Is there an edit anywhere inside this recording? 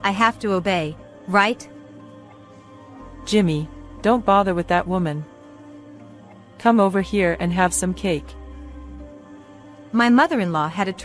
yes; 2 cuts; at 1.6 s, 3.1 s

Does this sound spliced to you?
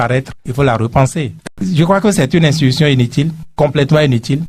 yes; 1 cut; at 1.6 s

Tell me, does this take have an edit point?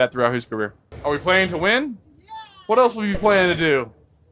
yes; 1 cut; at 0.9 s

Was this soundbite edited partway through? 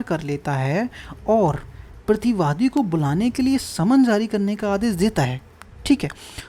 no; 0 cuts

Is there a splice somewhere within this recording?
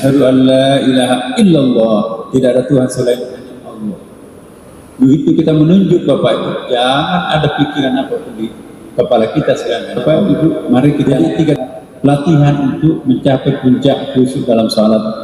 yes; 1 cut; at 10.0 s

